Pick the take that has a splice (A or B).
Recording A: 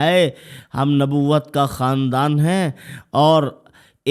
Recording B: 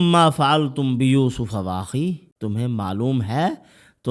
B